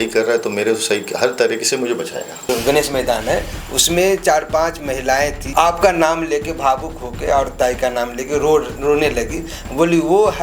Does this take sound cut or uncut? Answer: cut